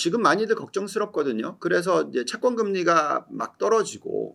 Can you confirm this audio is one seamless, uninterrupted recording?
yes; 0 cuts

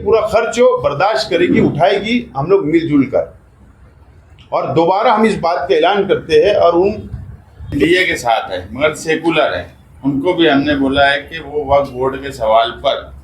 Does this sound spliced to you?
yes; 1 cut; at 7.8 s

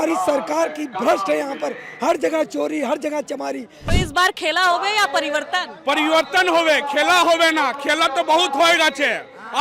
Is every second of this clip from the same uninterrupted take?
no; 1 cut; at 3.9 s

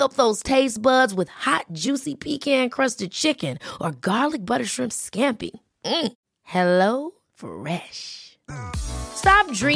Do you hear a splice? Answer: no; 0 cuts

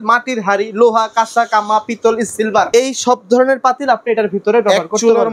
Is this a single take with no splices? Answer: yes; 0 cuts

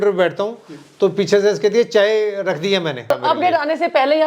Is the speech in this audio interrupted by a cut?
yes; 1 cut; at 3.0 s

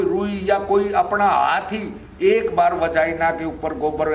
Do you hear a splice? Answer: no; 0 cuts

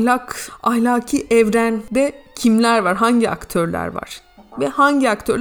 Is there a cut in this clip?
no; 0 cuts

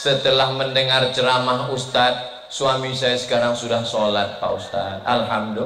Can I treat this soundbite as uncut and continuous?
yes; 0 cuts

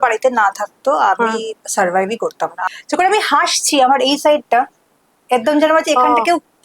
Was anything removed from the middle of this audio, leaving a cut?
yes; 1 cut; at 2.6 s

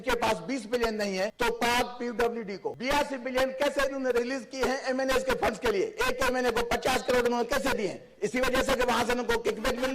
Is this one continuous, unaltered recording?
no; 2 cuts; at 1.3 s, 2.7 s

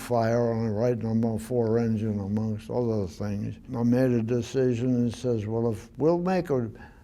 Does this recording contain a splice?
yes; 1 cut; at 3.6 s

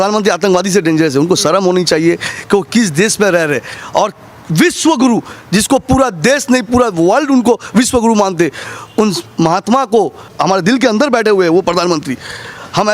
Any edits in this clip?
no; 0 cuts

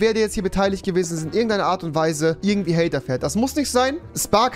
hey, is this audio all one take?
no; 1 cut; at 2.4 s

